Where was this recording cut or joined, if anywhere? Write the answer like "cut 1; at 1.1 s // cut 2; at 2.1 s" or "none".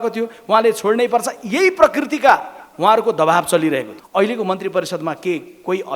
cut 1; at 4.0 s